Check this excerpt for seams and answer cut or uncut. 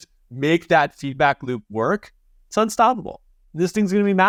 uncut